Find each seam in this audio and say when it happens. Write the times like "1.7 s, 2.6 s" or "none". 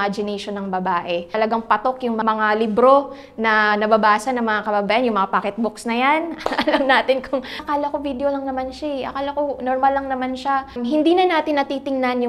1.3 s, 2.2 s, 7.6 s, 10.7 s